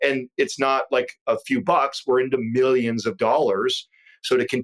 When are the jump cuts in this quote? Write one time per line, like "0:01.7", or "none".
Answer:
none